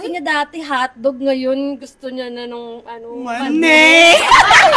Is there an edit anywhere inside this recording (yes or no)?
no